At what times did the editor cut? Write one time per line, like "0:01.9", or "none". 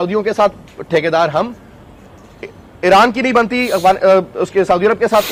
none